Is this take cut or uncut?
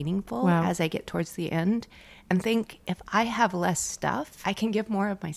cut